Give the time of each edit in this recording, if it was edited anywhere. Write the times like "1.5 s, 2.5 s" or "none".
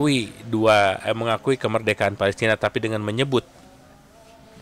none

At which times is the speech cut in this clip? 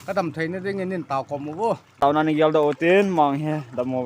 2.0 s

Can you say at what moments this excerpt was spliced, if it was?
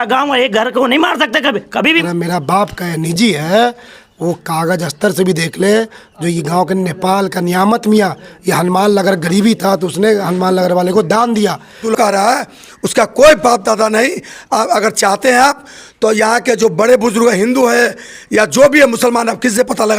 2.0 s, 11.8 s

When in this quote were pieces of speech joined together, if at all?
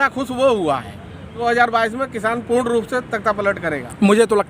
1.4 s

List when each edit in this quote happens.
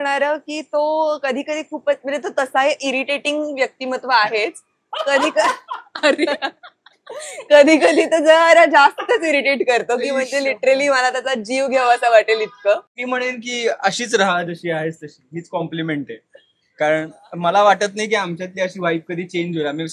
13.0 s

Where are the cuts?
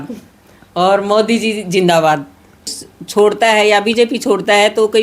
2.4 s

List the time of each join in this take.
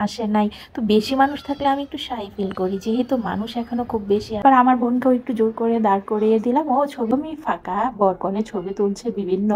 4.4 s, 7.1 s

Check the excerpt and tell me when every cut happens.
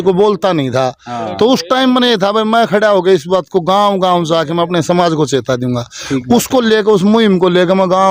none

